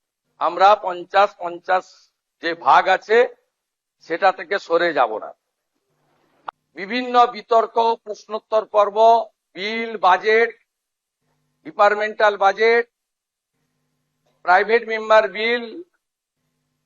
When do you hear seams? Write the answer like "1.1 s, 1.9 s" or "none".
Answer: 6.5 s